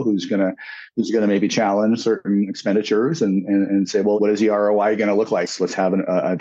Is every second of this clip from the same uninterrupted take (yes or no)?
no